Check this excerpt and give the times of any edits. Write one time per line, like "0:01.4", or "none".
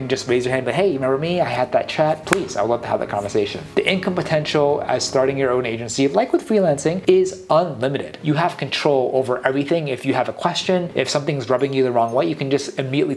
0:03.7
0:08.1